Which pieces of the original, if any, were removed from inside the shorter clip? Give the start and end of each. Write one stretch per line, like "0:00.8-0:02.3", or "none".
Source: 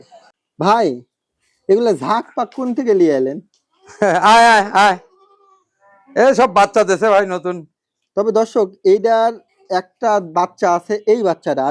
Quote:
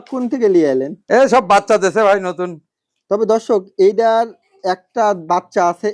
0:03.4-0:06.0